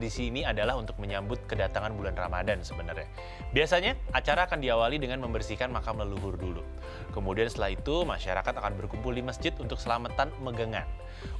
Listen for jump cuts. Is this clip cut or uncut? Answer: uncut